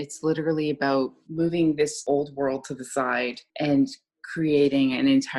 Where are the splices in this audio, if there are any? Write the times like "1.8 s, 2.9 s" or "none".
1.2 s, 2.0 s, 3.4 s